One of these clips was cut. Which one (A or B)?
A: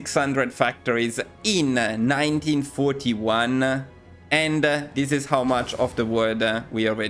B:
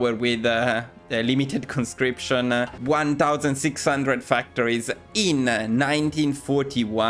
B